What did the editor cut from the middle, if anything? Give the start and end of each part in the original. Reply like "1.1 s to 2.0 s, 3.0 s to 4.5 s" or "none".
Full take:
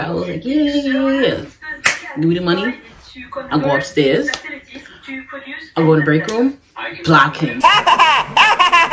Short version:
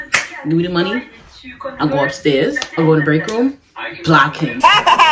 4.4 s to 5.6 s